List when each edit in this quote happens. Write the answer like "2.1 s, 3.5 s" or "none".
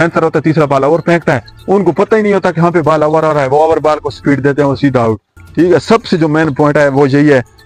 none